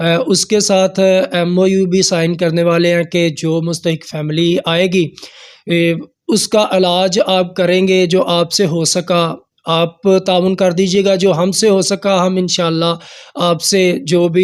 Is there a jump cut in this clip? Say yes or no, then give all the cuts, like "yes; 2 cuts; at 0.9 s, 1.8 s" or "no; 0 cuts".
no; 0 cuts